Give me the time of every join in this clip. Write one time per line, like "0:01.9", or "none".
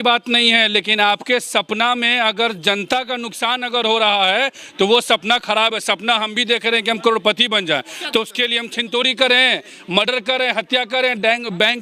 none